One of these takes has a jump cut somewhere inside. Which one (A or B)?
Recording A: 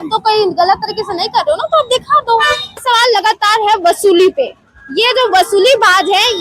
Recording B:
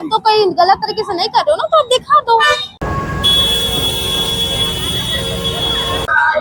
A